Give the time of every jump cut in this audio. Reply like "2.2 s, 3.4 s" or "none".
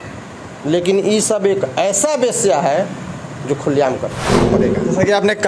4.4 s